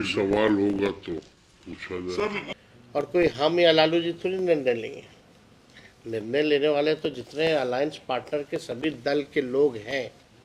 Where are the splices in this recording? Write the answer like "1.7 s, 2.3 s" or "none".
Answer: 2.5 s